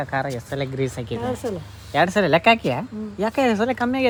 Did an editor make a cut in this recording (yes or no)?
no